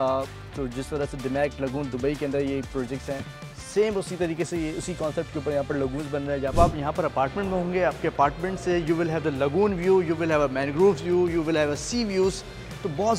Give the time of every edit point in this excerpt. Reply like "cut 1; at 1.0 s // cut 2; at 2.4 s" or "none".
cut 1; at 6.5 s